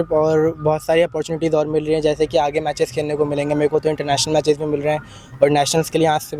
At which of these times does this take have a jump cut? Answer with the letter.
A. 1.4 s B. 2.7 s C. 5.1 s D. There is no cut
D